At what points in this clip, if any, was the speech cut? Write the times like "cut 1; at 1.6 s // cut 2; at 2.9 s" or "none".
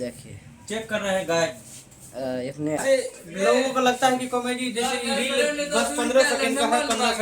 cut 1; at 2.8 s